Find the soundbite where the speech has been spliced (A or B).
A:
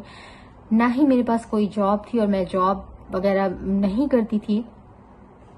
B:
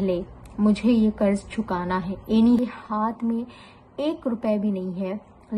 B